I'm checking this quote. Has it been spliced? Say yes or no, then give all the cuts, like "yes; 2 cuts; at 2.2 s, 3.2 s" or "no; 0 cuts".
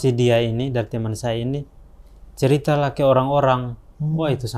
no; 0 cuts